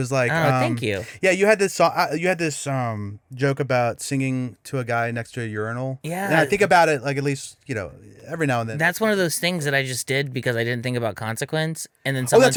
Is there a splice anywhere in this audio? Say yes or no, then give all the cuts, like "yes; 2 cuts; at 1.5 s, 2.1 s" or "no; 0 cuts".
no; 0 cuts